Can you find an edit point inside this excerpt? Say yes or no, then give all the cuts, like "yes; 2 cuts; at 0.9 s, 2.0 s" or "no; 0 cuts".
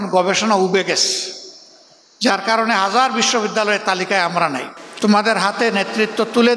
yes; 1 cut; at 4.7 s